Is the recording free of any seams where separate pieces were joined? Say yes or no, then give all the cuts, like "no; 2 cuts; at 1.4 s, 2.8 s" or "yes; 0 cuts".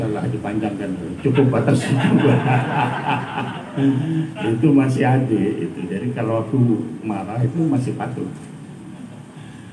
yes; 0 cuts